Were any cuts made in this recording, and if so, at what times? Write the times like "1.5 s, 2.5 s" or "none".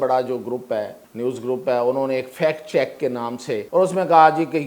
1.0 s, 3.6 s